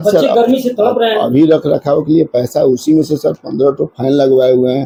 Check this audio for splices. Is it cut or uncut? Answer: uncut